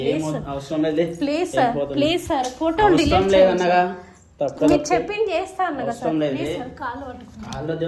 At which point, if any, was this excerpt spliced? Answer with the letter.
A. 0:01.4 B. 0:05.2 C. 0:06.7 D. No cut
D